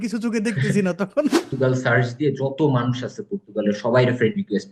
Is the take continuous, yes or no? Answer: no